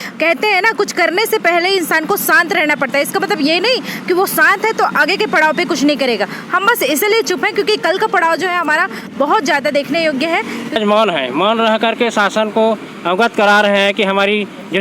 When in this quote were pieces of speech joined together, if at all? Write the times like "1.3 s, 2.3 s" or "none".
10.8 s